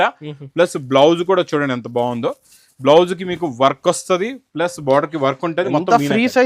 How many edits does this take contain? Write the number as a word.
zero